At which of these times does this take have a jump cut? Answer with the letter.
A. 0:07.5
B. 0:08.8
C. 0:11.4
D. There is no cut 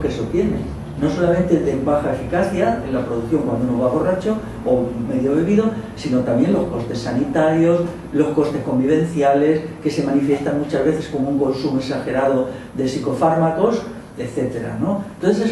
D